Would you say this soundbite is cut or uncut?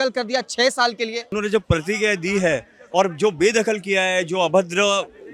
cut